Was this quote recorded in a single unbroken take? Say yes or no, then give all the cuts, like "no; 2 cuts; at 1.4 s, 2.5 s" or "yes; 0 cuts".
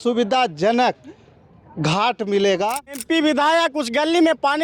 no; 1 cut; at 2.9 s